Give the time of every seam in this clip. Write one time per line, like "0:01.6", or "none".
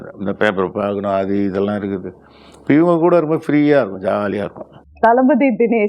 none